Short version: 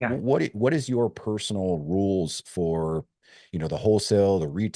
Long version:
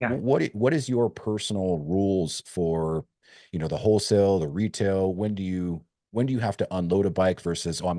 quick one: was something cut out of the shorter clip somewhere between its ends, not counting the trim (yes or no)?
no